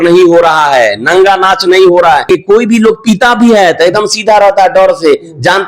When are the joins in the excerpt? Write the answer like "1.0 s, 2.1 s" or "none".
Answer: 2.2 s